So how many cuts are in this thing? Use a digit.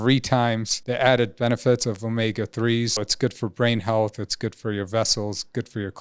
1